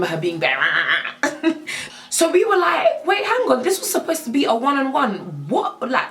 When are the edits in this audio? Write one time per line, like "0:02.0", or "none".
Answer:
0:01.8